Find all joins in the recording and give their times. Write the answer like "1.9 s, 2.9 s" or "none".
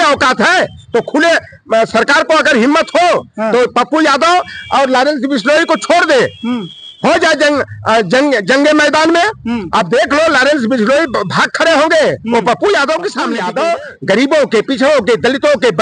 13.3 s